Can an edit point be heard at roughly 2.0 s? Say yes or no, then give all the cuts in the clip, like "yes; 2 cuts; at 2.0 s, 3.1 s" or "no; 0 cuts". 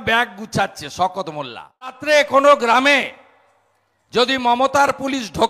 yes; 1 cut; at 2.0 s